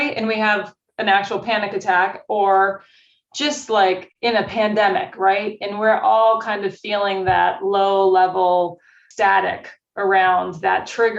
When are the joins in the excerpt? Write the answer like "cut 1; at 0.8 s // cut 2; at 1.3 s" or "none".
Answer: cut 1; at 9.0 s